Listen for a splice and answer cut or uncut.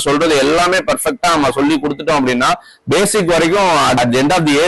uncut